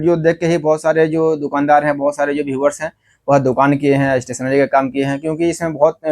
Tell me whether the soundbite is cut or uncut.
uncut